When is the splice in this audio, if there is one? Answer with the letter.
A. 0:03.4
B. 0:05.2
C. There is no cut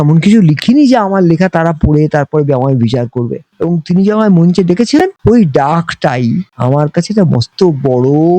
A